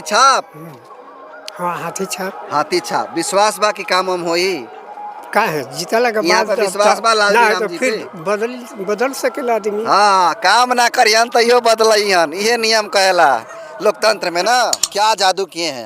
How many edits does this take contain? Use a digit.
1